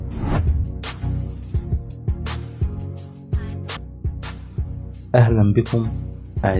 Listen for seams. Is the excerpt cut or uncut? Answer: uncut